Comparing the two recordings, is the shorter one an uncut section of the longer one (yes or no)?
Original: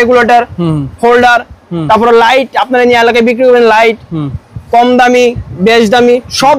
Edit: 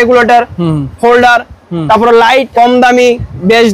no